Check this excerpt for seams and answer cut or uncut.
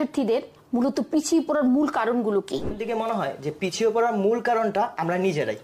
cut